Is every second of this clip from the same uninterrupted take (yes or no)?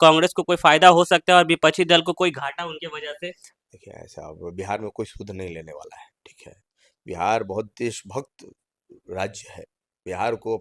yes